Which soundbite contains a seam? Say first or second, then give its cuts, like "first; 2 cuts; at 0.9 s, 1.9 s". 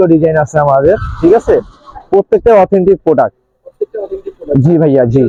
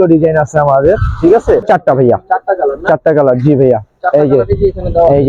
second; 1 cut; at 1.7 s